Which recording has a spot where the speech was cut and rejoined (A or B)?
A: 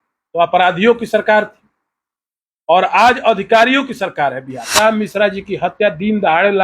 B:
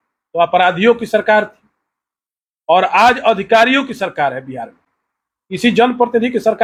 A